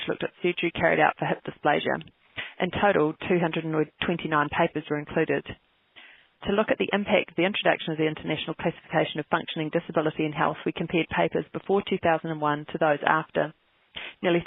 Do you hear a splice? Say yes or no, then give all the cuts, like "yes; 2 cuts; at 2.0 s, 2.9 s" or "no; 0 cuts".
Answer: no; 0 cuts